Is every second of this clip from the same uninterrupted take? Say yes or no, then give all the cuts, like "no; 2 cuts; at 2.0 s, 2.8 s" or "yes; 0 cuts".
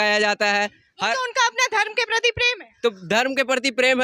yes; 0 cuts